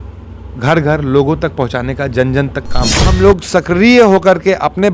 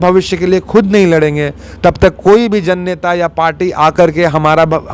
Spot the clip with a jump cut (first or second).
first